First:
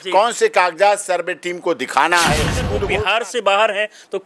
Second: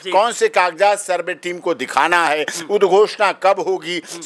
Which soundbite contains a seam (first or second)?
first